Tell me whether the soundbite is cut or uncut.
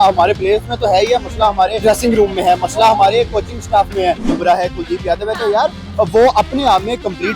cut